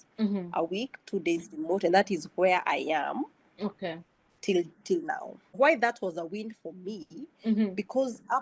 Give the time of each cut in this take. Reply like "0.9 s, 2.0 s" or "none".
5.4 s